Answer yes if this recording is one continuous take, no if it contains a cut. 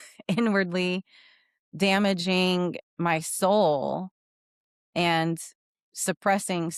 yes